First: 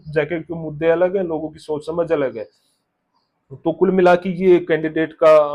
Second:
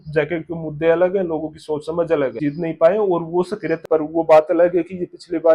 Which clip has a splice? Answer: second; 2 cuts; at 2.4 s, 3.8 s

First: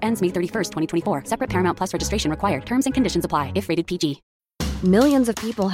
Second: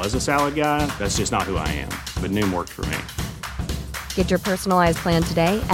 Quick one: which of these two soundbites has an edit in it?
first; 1 cut; at 4.3 s

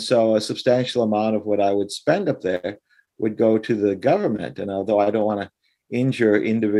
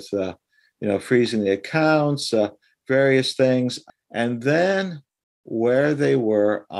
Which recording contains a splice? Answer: second; 1 cut; at 3.9 s

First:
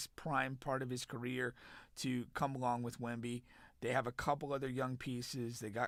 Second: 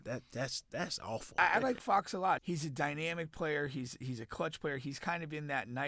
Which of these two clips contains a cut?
second; 2 cuts; at 1.4 s, 2.4 s

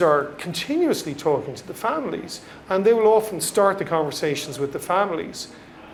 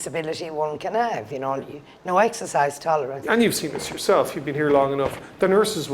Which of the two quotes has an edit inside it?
second; 1 cut; at 3.2 s

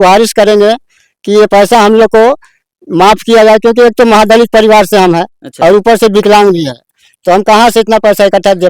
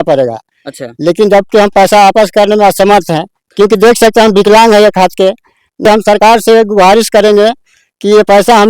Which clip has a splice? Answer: second; 1 cut; at 5.9 s

